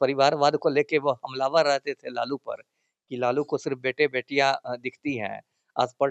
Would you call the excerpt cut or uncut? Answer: uncut